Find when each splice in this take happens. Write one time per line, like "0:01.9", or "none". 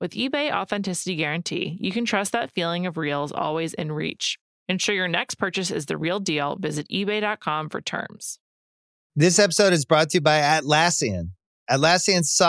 0:08.5